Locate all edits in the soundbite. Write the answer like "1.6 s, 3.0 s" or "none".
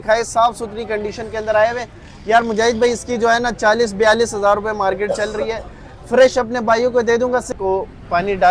7.5 s

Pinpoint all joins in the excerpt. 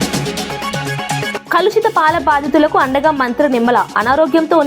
1.3 s

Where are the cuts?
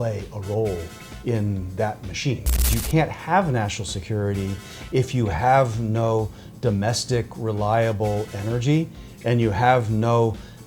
2.8 s

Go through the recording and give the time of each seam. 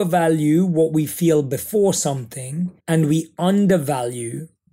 2.8 s

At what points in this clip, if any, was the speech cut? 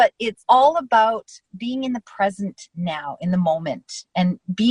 none

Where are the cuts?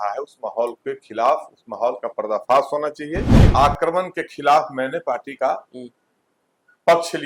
3.3 s

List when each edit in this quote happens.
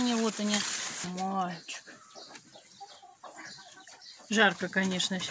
1.0 s

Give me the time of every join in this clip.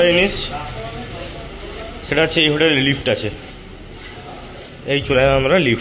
none

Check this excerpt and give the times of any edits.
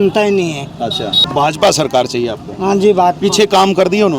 1.3 s

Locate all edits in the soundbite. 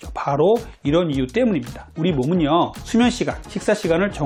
none

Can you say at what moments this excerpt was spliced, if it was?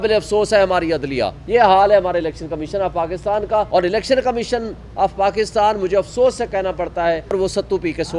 1.4 s, 3.7 s, 7.3 s

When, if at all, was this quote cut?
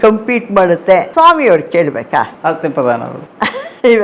1.1 s, 2.3 s

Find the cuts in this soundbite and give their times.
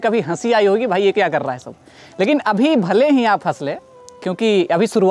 none

